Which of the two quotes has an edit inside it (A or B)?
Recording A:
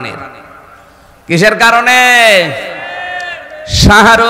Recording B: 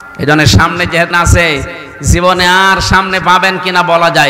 B